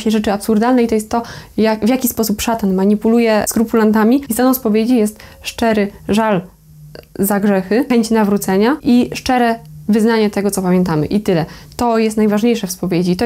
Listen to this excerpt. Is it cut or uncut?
cut